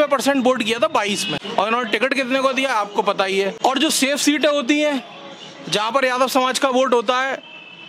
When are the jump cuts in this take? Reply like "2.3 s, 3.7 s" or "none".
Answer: 1.4 s, 3.5 s

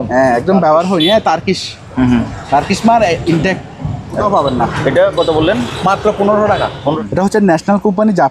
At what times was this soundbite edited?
4.2 s, 7.0 s

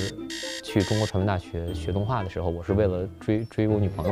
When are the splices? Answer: none

